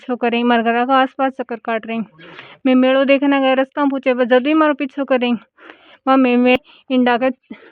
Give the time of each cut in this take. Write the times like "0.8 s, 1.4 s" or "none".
6.6 s